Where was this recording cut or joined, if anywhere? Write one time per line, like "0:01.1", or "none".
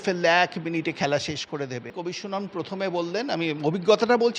0:02.0